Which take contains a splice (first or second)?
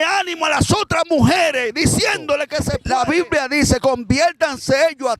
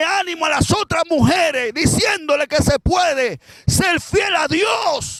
first